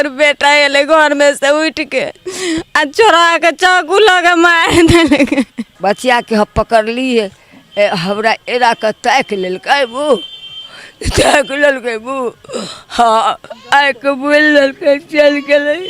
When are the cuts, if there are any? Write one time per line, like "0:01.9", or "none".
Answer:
0:05.7